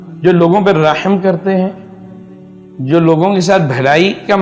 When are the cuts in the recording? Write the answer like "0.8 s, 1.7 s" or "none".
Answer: none